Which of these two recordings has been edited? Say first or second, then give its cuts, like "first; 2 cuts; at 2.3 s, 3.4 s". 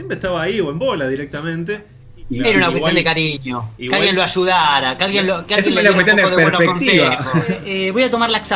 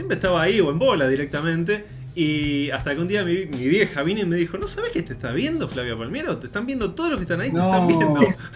first; 2 cuts; at 2.0 s, 7.7 s